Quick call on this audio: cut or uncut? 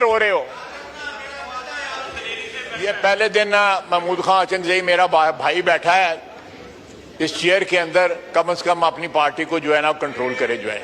cut